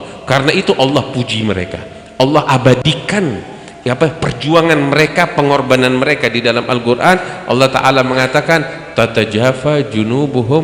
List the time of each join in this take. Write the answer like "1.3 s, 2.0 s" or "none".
none